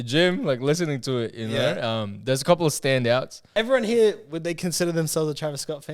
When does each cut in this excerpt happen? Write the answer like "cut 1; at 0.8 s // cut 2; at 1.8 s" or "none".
cut 1; at 3.5 s